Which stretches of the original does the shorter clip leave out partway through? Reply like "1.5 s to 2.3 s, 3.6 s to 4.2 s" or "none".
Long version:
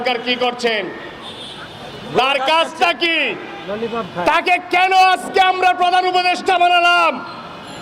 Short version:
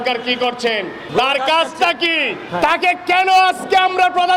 1.0 s to 2.0 s, 3.5 s to 4.1 s